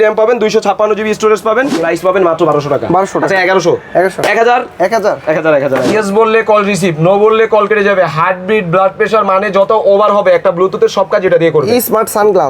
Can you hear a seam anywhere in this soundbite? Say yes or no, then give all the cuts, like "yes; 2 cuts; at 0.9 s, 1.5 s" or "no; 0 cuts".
yes; 2 cuts; at 1.8 s, 5.9 s